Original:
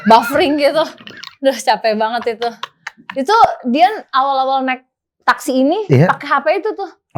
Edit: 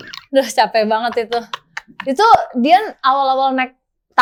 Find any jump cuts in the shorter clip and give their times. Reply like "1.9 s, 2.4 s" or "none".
none